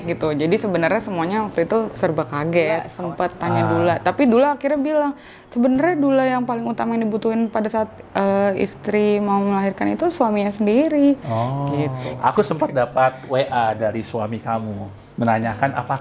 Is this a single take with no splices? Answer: no; 2 cuts; at 2.9 s, 12.0 s

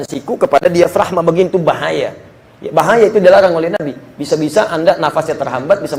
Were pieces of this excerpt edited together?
no; 0 cuts

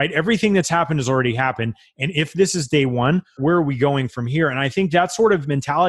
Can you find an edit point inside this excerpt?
yes; 1 cut; at 3.3 s

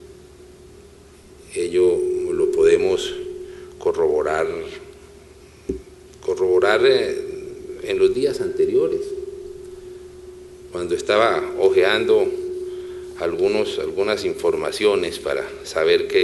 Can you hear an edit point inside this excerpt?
no; 0 cuts

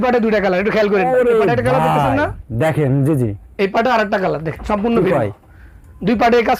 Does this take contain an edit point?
no; 0 cuts

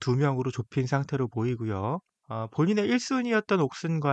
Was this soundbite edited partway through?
yes; 1 cut; at 2.2 s

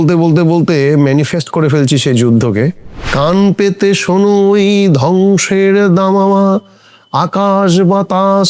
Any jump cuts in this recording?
yes; 1 cut; at 3.0 s

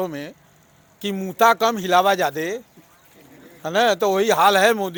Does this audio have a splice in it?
no; 0 cuts

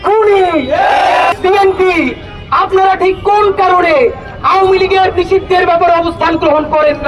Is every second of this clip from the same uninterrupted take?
no; 1 cut; at 1.3 s

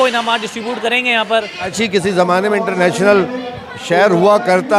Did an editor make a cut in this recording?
yes; 1 cut; at 1.7 s

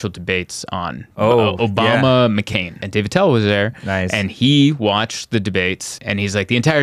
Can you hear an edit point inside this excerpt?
yes; 2 cuts; at 2.8 s, 5.9 s

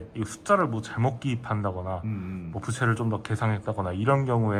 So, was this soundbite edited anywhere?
no; 0 cuts

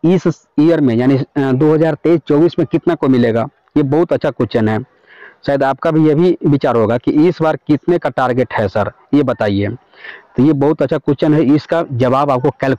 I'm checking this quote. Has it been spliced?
no; 0 cuts

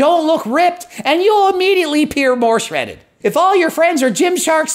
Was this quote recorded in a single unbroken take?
yes; 0 cuts

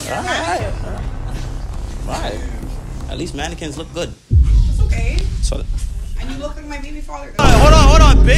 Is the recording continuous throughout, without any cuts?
no; 1 cut; at 7.4 s

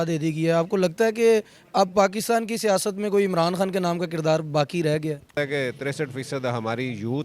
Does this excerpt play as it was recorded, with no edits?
no; 1 cut; at 5.3 s

